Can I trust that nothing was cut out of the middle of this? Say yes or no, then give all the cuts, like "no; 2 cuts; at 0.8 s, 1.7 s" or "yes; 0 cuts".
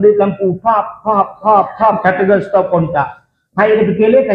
yes; 0 cuts